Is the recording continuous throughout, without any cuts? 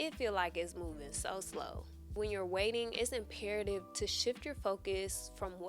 no; 1 cut; at 2.1 s

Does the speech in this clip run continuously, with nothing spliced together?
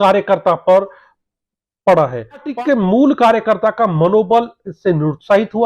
no; 1 cut; at 2.5 s

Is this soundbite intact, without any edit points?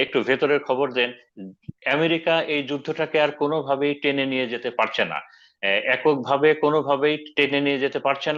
yes; 0 cuts

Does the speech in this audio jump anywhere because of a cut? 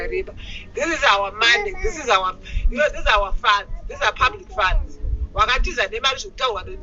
no; 0 cuts

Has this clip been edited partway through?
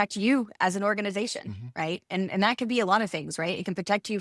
no; 0 cuts

